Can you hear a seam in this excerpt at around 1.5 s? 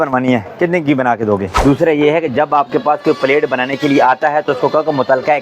yes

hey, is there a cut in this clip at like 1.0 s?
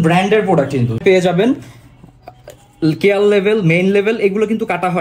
yes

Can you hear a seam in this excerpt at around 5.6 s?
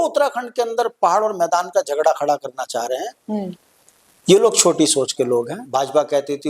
yes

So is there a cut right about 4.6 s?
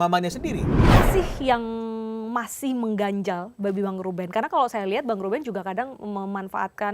no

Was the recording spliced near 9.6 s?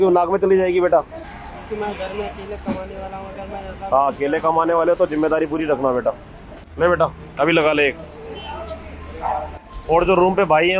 yes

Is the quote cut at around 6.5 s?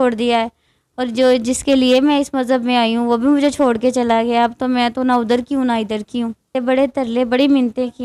yes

